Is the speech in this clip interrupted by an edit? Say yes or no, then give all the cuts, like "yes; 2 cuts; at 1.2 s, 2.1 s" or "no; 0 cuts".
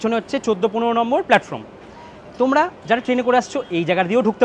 no; 0 cuts